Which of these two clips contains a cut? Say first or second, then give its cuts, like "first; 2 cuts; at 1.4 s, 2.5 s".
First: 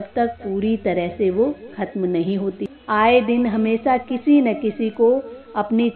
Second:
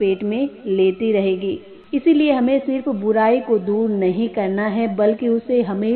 first; 1 cut; at 2.7 s